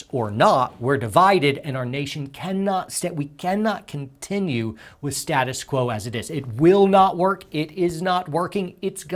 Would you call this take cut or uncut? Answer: uncut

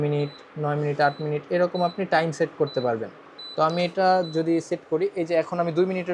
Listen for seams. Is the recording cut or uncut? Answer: uncut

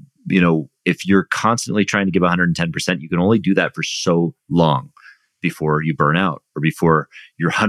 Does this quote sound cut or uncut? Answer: uncut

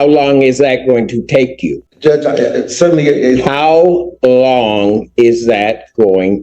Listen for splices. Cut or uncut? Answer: cut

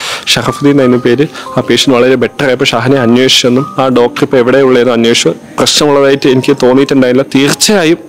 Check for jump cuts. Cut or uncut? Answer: cut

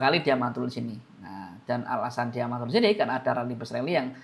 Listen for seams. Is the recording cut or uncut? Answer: uncut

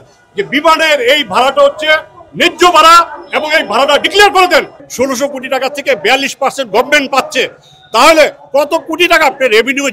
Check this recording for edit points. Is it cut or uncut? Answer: cut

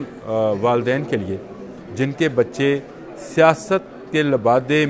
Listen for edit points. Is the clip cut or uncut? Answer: uncut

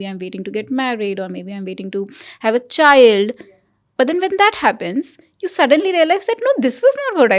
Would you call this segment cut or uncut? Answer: uncut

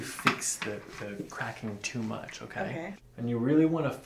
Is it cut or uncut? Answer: cut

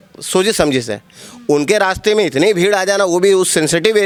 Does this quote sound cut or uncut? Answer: uncut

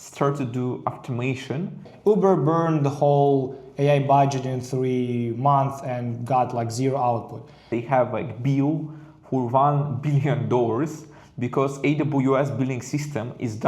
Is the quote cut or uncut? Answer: cut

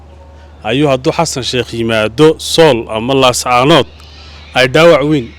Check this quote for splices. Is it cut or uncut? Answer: uncut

